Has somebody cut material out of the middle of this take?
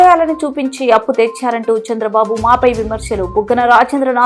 no; 0 cuts

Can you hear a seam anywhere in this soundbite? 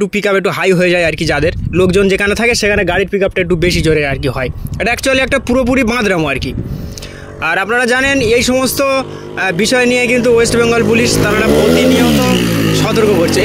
no; 0 cuts

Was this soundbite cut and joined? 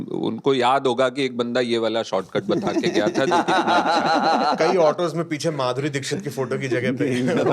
no; 0 cuts

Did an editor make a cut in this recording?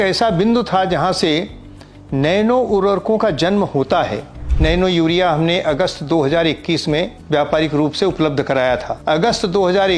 yes; 3 cuts; at 4.5 s, 7.2 s, 8.9 s

